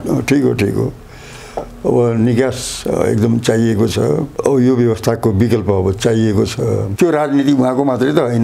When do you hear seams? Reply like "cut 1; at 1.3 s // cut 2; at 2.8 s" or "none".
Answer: cut 1; at 4.3 s // cut 2; at 6.9 s